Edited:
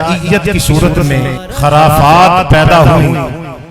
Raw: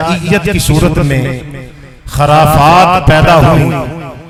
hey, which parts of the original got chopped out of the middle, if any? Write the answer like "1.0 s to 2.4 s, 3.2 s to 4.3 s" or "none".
1.4 s to 2.0 s